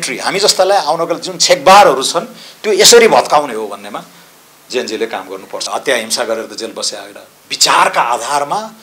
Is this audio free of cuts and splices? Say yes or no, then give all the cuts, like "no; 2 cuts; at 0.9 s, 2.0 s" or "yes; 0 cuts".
no; 1 cut; at 5.7 s